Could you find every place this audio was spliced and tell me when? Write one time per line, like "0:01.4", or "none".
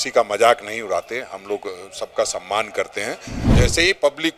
0:03.4